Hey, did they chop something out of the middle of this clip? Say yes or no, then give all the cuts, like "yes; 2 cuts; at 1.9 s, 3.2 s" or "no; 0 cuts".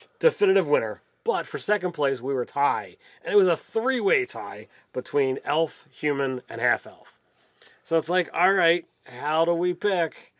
yes; 1 cut; at 8.0 s